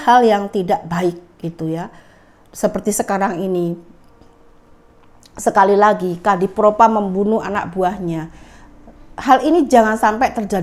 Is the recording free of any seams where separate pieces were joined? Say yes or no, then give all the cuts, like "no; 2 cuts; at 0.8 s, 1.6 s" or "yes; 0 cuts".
yes; 0 cuts